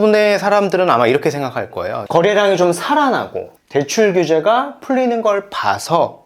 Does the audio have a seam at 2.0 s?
yes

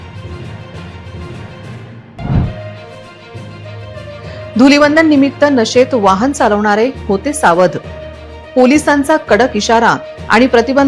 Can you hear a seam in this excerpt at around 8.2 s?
no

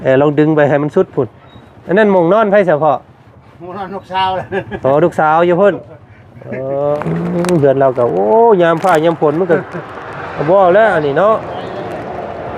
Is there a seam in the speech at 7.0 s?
yes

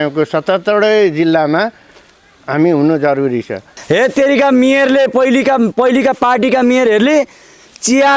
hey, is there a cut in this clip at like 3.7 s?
yes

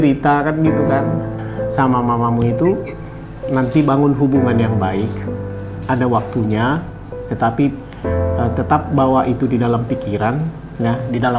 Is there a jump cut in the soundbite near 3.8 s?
no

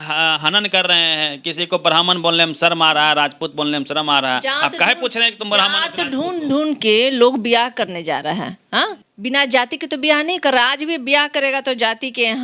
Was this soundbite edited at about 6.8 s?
no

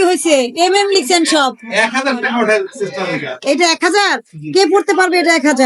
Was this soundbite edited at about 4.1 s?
no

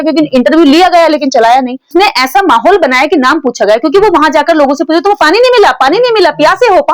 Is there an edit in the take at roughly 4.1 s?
no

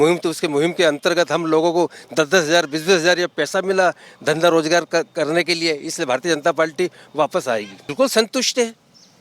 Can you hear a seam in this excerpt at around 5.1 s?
no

